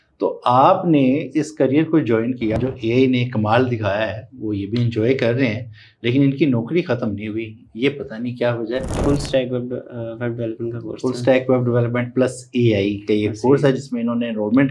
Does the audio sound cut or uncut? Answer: cut